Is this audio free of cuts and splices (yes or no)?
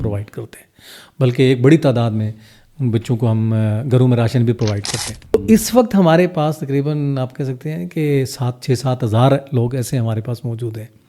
no